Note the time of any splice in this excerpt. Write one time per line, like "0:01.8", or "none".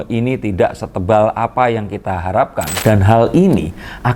0:02.7